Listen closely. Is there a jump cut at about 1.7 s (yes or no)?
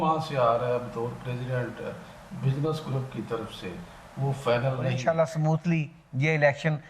no